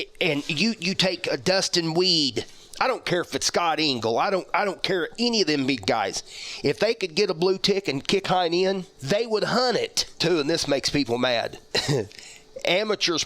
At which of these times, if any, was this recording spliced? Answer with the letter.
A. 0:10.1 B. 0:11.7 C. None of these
A